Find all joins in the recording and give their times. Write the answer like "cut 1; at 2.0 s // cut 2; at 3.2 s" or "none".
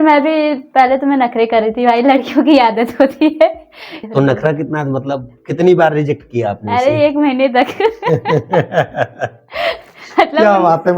cut 1; at 3.9 s